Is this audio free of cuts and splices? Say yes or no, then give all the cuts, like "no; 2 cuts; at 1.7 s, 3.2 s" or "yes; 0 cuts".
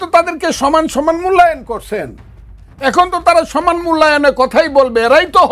yes; 0 cuts